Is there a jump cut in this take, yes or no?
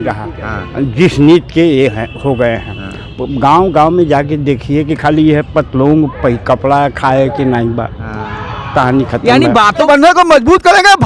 yes